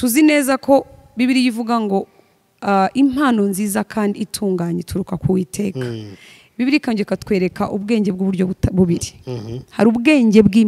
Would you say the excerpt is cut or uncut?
uncut